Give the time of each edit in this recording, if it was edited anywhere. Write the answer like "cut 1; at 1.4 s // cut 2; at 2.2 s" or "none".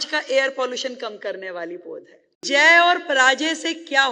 cut 1; at 2.4 s